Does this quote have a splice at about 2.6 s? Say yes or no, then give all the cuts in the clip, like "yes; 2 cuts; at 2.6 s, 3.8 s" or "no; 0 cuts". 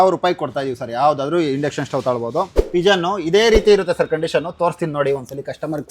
yes; 1 cut; at 2.6 s